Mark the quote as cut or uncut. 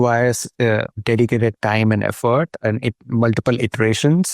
cut